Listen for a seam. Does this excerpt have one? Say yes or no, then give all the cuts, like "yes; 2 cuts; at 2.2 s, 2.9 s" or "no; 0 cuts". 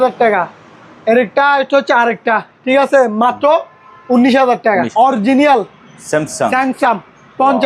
yes; 1 cut; at 4.9 s